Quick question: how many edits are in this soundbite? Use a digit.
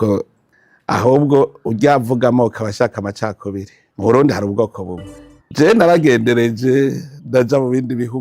1